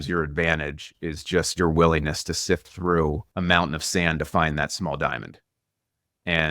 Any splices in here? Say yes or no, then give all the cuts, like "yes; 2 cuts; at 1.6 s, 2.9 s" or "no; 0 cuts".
yes; 1 cut; at 3.3 s